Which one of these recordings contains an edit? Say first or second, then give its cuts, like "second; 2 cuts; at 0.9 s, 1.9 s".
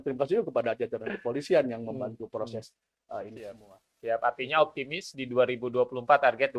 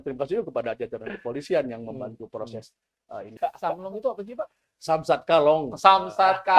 second; 1 cut; at 3.3 s